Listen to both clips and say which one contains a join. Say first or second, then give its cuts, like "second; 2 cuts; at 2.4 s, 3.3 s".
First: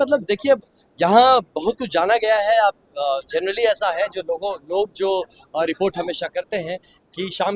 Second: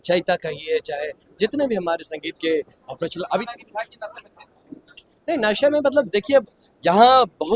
second; 1 cut; at 3.4 s